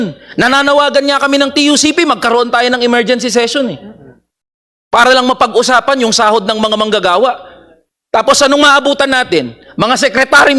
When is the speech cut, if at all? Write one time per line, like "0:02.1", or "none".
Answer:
none